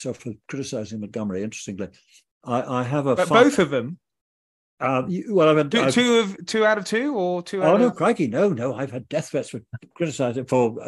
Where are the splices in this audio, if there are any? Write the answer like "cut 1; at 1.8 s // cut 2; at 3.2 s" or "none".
none